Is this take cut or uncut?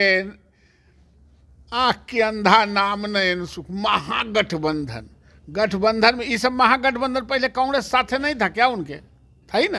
uncut